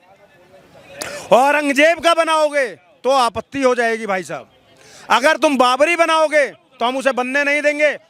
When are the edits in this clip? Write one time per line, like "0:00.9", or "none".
none